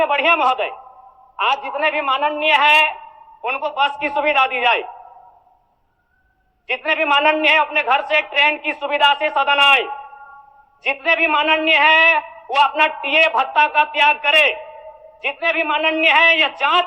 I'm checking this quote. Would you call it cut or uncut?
uncut